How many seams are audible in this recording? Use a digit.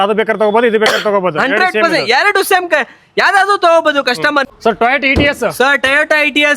1